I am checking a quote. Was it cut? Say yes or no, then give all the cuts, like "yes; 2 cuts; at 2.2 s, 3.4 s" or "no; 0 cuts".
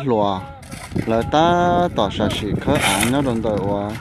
no; 0 cuts